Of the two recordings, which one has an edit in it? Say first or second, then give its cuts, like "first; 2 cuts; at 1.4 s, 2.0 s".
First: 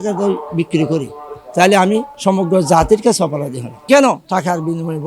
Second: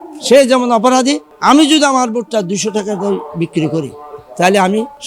first; 1 cut; at 4.1 s